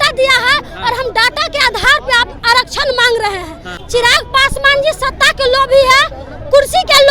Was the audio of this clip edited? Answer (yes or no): yes